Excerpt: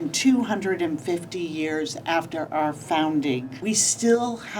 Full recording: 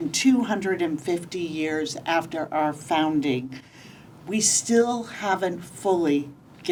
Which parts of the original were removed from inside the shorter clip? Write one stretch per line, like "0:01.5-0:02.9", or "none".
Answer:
0:03.5-0:04.2